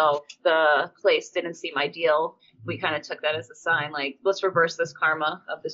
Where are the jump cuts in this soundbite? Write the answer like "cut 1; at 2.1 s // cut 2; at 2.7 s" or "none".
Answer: cut 1; at 0.9 s // cut 2; at 2.5 s